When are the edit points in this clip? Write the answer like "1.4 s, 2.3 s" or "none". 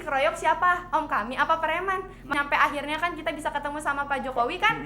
2.3 s